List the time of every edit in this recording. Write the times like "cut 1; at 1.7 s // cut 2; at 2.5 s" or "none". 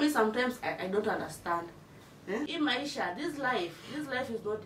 cut 1; at 2.5 s